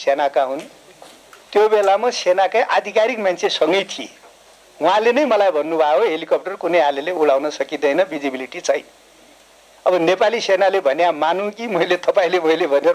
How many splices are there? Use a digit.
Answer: 0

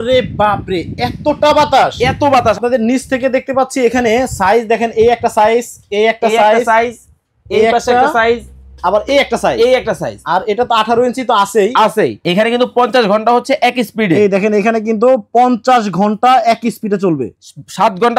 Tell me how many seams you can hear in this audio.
2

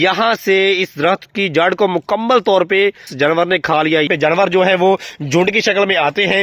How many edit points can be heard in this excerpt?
2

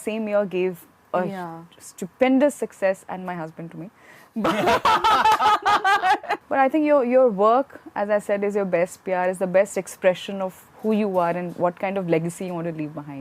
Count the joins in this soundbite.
1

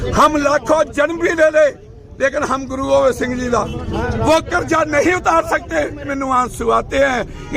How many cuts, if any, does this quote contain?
1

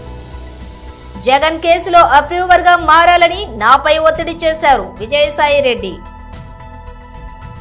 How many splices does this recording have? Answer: 2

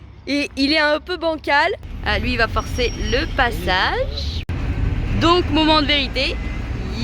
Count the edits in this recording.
2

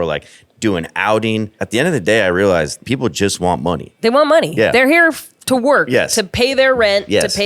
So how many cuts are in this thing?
3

